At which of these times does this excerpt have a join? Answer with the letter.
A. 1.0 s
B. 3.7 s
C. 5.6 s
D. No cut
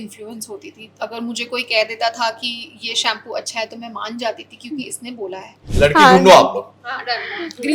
C